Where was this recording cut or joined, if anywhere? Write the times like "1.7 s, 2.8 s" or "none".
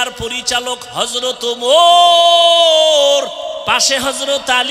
3.6 s